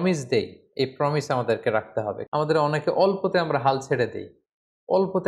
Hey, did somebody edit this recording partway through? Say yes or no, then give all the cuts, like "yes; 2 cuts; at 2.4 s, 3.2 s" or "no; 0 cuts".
yes; 1 cut; at 2.2 s